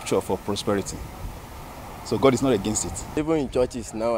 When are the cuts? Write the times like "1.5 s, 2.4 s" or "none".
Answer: 3.2 s